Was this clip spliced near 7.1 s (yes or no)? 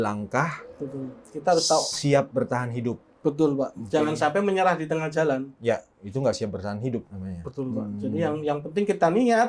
no